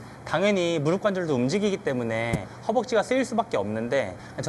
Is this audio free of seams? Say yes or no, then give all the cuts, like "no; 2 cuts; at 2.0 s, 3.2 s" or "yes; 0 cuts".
yes; 0 cuts